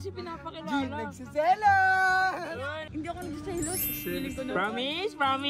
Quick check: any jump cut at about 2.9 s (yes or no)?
yes